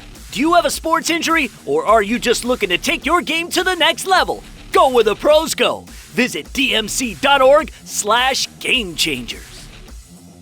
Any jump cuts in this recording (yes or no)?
yes